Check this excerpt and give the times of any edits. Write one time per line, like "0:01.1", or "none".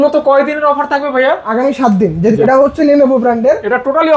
0:02.4